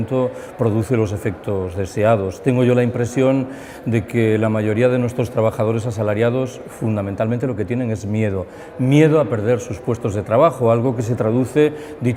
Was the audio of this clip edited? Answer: no; 0 cuts

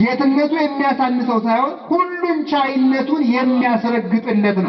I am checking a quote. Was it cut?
no; 0 cuts

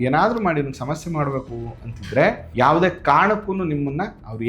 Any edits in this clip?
yes; 1 cut; at 2.4 s

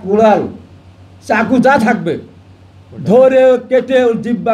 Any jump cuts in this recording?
no; 0 cuts

